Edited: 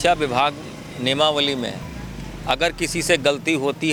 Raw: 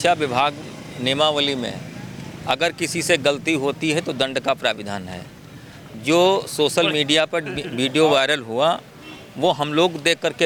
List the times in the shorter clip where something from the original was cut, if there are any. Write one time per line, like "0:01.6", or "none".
none